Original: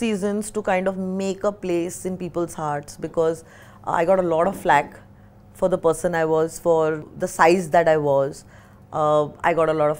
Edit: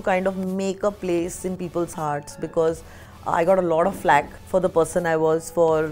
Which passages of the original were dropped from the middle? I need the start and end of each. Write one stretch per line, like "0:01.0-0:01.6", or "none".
0:05.0-0:05.5